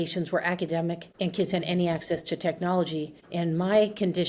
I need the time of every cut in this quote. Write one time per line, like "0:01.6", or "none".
none